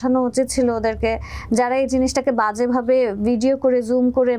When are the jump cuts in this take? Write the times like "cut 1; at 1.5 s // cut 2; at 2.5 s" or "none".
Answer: none